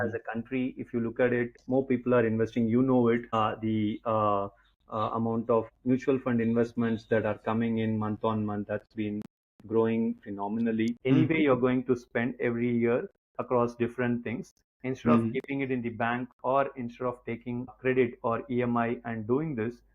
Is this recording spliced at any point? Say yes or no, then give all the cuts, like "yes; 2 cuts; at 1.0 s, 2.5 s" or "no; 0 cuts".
yes; 5 cuts; at 1.6 s, 3.3 s, 5.7 s, 11.0 s, 17.7 s